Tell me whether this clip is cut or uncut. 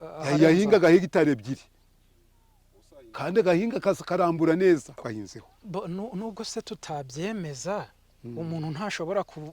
cut